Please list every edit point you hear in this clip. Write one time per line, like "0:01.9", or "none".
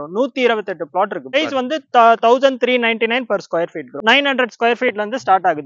0:01.4
0:03.9

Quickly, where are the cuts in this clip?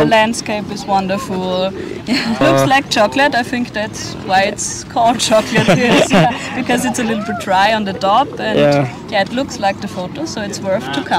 0:02.4

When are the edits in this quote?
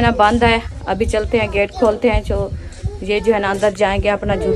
none

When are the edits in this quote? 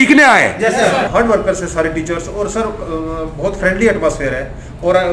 0:01.1

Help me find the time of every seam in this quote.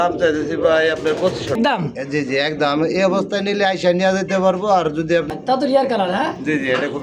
0:01.5
0:05.3

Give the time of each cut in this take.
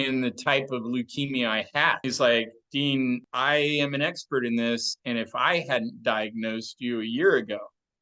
0:02.0
0:03.3

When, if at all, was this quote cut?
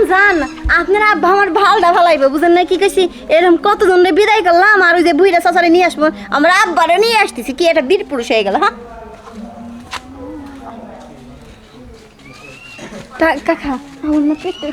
0:11.2

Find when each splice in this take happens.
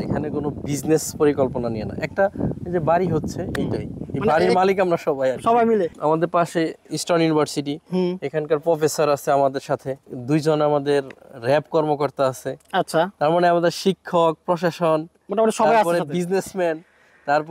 0:05.9
0:10.0

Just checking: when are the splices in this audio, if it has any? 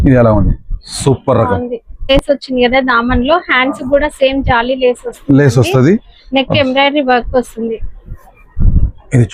0:02.1

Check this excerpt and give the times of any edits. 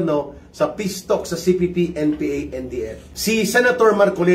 0:03.0

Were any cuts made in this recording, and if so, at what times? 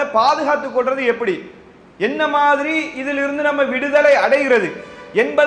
none

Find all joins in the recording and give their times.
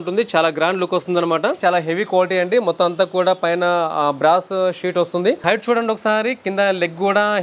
0:01.6
0:05.4

